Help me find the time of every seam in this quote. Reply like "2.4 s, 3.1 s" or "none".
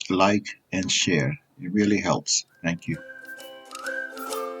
3.2 s